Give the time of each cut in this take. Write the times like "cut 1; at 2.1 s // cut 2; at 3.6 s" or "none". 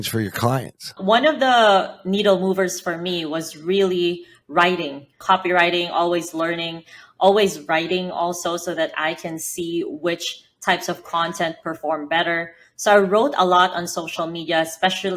cut 1; at 0.9 s // cut 2; at 5.2 s